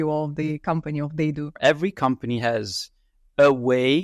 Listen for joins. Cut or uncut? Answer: cut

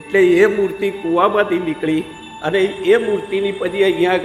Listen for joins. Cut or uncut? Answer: uncut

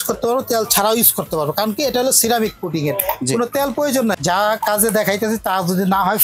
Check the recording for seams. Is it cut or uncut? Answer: cut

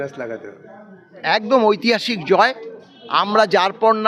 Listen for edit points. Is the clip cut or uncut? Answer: uncut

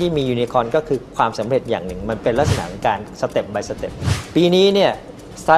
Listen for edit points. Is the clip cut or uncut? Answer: cut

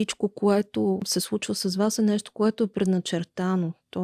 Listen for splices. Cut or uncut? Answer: cut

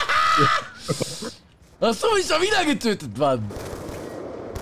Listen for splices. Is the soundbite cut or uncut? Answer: cut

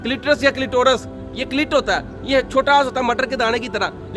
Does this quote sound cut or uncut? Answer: uncut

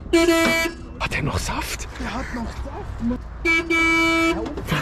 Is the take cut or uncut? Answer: cut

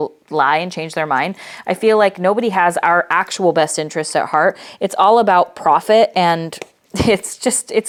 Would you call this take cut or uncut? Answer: uncut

